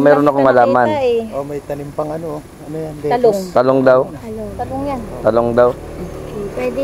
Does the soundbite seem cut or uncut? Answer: uncut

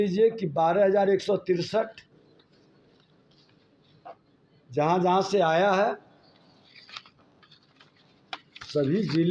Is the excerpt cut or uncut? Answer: uncut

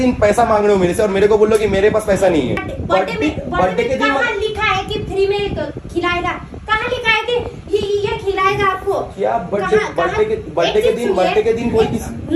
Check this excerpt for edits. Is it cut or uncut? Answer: uncut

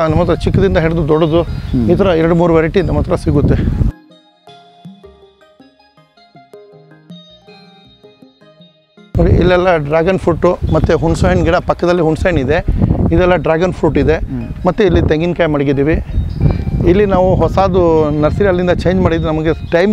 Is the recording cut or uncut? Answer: uncut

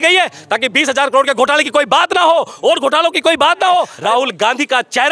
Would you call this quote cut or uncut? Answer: cut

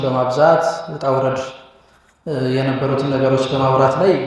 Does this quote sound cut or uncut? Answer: uncut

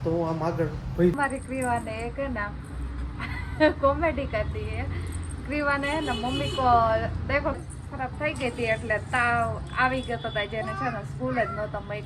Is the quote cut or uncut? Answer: cut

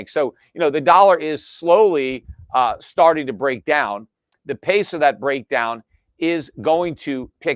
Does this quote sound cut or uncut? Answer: uncut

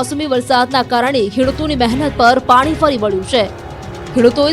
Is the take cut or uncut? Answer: uncut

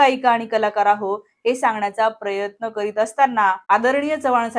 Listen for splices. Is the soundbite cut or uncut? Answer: cut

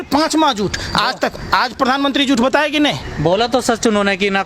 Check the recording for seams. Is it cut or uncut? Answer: uncut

